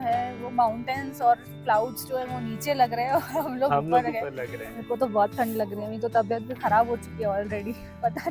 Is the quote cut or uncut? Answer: uncut